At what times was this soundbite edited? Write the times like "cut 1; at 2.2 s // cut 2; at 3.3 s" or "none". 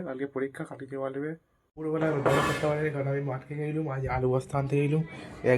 cut 1; at 1.7 s